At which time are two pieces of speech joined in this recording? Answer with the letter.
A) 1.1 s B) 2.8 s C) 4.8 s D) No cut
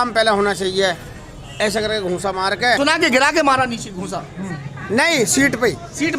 B